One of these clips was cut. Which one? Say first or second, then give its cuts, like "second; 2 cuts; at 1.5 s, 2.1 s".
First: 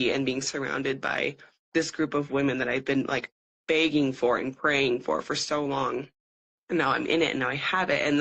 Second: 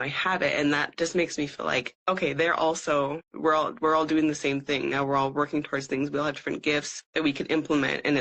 second; 3 cuts; at 1.9 s, 3.3 s, 7.0 s